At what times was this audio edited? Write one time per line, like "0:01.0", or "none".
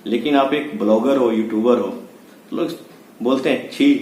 none